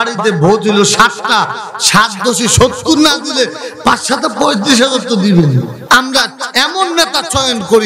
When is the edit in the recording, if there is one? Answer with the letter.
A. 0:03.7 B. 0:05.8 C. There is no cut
B